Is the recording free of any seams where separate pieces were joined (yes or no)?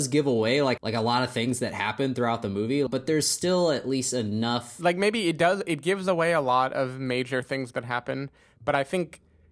no